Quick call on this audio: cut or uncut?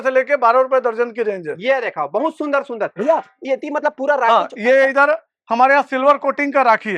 uncut